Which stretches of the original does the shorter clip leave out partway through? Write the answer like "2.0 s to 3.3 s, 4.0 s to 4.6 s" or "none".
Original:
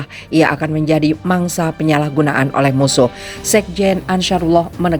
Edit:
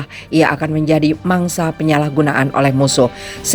none